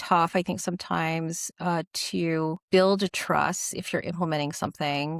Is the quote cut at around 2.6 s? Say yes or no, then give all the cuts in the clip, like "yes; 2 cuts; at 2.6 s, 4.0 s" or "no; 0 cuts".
yes; 1 cut; at 2.6 s